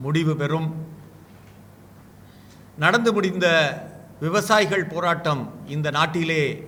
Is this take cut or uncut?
uncut